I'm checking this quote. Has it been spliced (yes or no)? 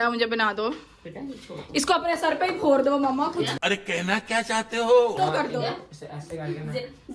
no